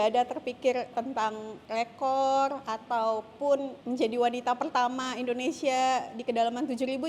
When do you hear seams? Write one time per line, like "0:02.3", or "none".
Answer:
0:01.0
0:03.7